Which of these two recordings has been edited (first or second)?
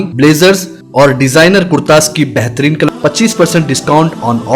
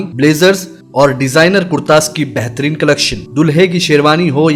first